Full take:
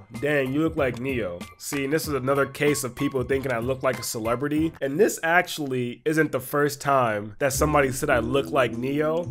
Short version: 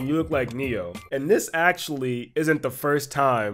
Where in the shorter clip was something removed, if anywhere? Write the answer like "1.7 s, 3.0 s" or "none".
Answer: 1.1 s